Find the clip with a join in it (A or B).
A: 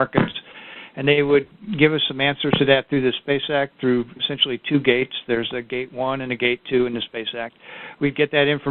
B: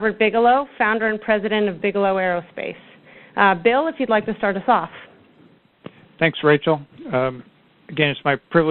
A